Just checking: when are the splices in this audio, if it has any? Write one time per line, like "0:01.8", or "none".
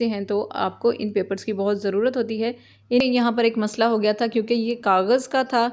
0:03.0